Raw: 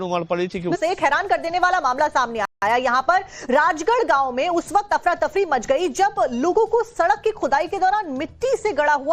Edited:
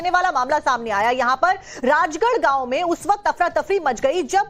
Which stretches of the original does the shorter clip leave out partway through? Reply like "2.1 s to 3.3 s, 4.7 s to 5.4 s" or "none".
2.4 s to 2.6 s